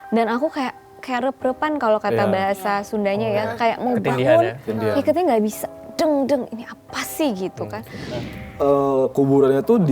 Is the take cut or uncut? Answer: cut